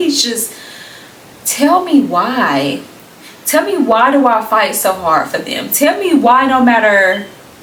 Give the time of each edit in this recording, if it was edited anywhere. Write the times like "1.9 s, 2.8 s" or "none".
none